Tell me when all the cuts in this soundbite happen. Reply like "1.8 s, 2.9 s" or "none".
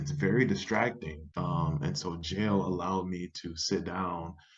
1.2 s

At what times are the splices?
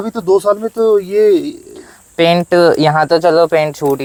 none

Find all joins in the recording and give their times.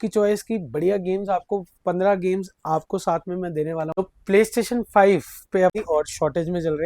4.0 s, 5.8 s

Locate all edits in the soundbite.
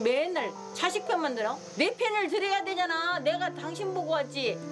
1.6 s

